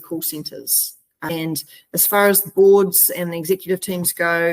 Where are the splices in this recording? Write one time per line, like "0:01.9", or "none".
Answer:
0:01.3

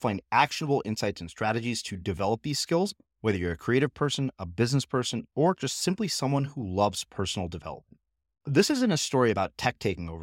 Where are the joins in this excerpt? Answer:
none

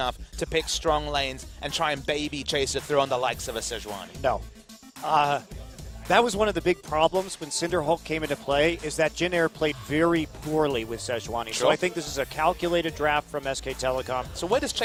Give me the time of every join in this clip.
none

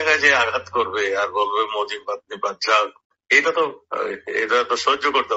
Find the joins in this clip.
0:03.1

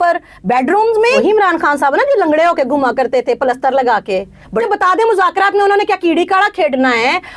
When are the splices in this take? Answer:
0:01.2
0:04.6

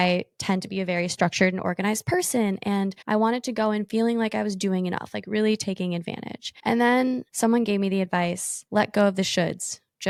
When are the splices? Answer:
none

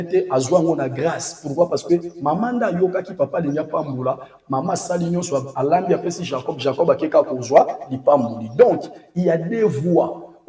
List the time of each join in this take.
none

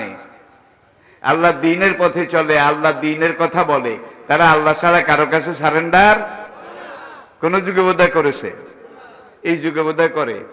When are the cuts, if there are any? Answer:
none

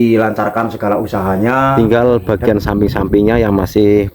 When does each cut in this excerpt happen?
0:01.8

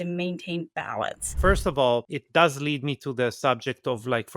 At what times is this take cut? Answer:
0:01.2
0:02.2

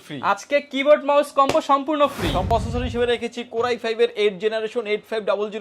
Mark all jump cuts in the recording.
0:02.5

